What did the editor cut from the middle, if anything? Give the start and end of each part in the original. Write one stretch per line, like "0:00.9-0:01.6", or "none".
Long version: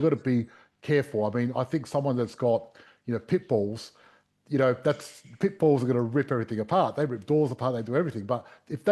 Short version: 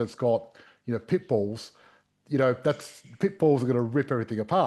none